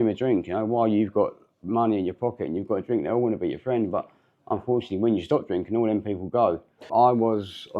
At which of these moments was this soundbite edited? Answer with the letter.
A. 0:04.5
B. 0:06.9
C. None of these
B